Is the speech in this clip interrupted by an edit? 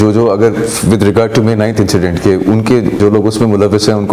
yes; 1 cut; at 3.0 s

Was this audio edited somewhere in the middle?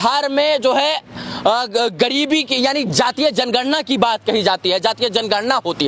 no; 0 cuts

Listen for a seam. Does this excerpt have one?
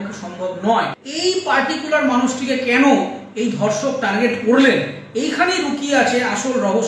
yes; 1 cut; at 1.0 s

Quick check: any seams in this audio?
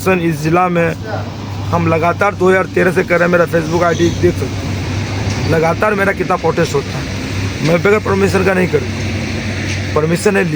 no; 0 cuts

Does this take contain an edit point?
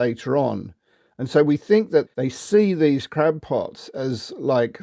yes; 1 cut; at 2.1 s

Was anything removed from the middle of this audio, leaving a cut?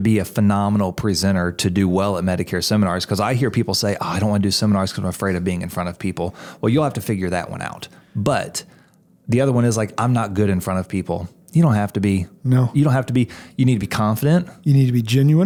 no; 0 cuts

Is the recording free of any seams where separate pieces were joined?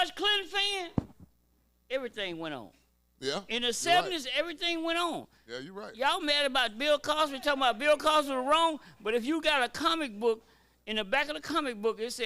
yes; 0 cuts

